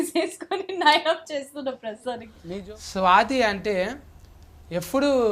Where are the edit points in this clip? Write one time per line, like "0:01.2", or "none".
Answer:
0:02.3